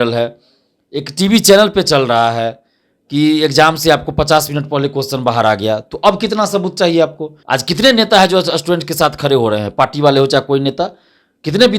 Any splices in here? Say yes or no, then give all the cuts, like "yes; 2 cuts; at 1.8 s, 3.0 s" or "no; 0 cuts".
yes; 1 cut; at 7.3 s